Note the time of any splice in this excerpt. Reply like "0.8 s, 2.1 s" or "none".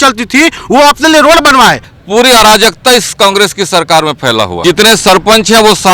1.9 s, 4.6 s